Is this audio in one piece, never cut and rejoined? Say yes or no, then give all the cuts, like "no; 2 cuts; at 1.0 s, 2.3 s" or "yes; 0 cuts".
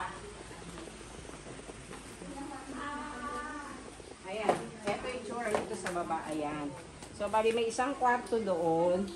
yes; 0 cuts